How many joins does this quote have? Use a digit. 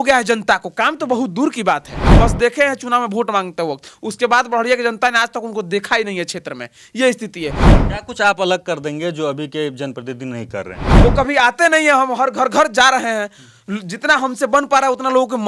3